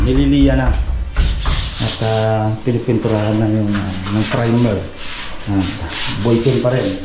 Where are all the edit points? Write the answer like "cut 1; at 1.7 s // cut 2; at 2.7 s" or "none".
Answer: none